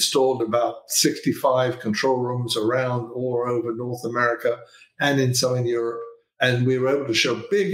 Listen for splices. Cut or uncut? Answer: uncut